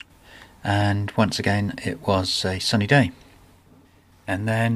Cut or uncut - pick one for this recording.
cut